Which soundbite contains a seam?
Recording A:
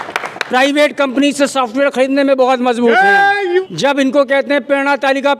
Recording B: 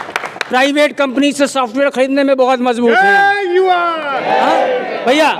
A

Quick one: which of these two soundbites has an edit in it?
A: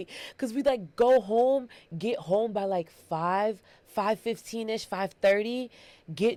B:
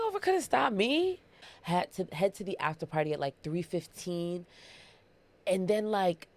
B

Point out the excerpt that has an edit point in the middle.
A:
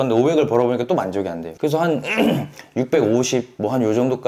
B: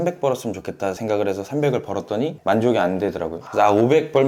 B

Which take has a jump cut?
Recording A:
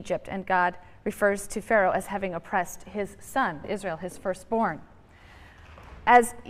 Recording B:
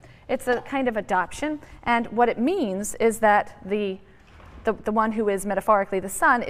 B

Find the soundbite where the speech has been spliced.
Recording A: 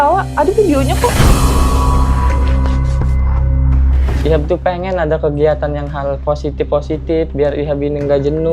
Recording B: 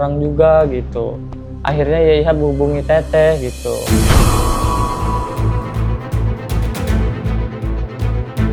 A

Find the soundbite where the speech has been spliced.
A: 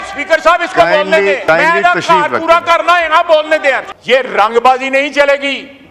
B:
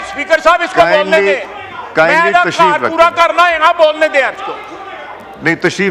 A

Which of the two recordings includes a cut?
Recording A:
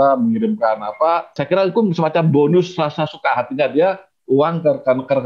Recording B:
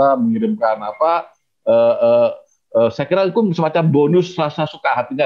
A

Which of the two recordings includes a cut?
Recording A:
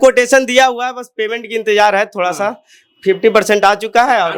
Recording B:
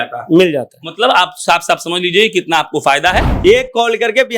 B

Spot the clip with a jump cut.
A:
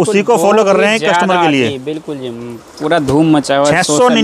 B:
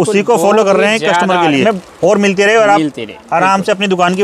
B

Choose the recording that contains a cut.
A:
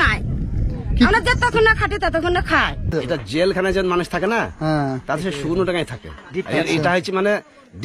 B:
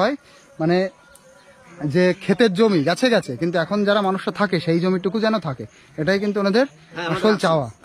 A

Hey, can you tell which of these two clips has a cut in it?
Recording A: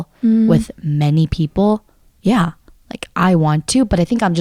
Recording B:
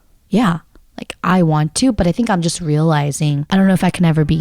B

